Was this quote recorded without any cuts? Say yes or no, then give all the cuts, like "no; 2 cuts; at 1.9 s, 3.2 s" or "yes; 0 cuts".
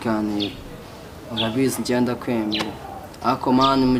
yes; 0 cuts